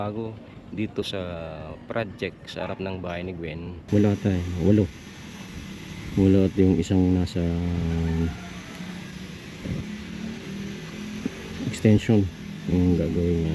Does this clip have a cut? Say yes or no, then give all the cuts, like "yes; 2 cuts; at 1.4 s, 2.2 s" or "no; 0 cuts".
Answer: yes; 1 cut; at 3.8 s